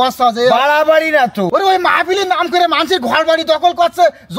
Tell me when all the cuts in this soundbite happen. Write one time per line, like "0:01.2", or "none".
0:01.5